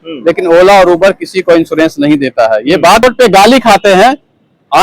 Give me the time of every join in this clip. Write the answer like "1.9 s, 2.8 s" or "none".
3.0 s